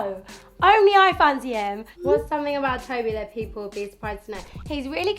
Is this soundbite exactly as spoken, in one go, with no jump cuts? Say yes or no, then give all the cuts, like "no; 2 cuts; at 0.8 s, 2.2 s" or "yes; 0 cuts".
no; 1 cut; at 1.9 s